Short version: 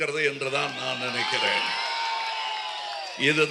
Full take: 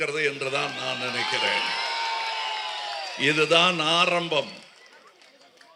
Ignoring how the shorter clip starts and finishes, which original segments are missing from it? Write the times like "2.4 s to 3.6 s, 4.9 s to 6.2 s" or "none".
none